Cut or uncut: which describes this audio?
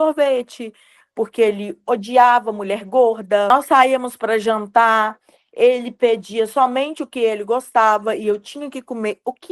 cut